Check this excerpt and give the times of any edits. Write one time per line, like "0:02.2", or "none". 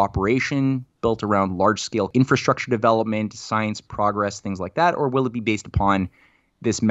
0:02.1